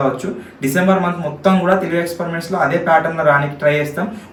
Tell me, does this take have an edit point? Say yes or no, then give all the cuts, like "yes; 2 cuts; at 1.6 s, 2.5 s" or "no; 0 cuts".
no; 0 cuts